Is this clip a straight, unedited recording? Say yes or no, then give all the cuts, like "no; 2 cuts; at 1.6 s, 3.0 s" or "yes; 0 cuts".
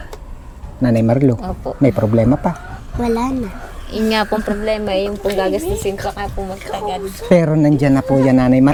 yes; 0 cuts